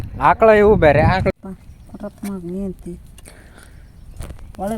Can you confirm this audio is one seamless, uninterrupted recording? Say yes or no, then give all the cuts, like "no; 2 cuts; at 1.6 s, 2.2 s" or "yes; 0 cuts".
no; 1 cut; at 1.3 s